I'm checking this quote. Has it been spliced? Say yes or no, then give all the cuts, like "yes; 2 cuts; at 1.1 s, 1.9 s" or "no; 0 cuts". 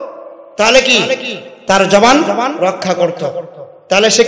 no; 0 cuts